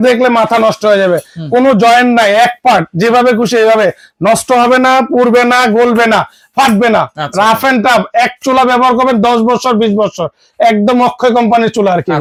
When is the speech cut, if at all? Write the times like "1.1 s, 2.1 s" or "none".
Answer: none